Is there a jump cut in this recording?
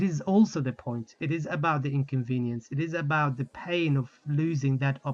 no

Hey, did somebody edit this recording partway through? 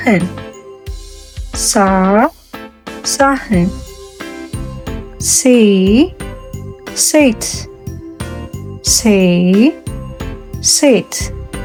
no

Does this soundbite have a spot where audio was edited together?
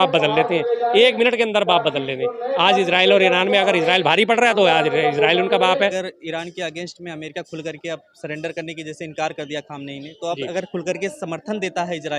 yes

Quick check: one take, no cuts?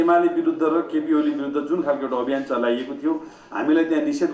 yes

